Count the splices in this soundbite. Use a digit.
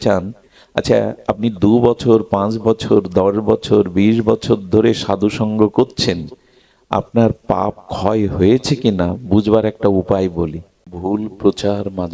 1